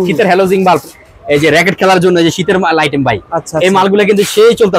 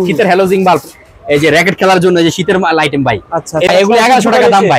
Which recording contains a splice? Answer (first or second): second